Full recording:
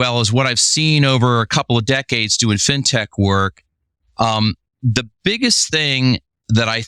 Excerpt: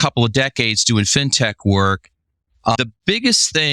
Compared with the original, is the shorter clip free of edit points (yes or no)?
no